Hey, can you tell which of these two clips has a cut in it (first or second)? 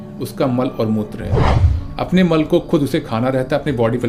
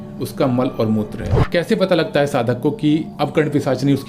second